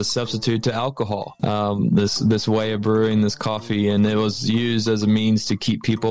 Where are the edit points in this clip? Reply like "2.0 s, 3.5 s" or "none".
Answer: 1.3 s